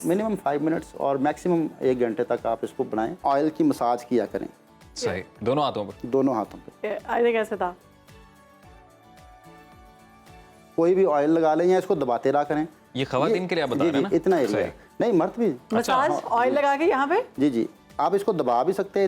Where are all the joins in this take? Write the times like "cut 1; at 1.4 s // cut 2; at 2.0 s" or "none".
cut 1; at 3.1 s